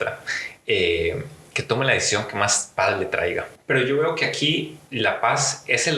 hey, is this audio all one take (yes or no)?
no